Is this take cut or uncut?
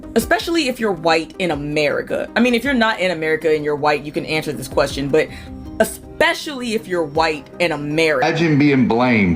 cut